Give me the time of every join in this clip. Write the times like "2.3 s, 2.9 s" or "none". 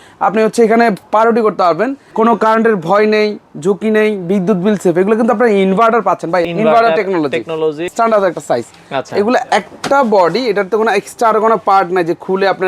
2.0 s, 6.4 s, 7.9 s